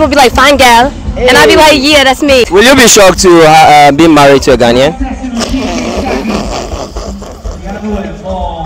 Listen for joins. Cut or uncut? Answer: cut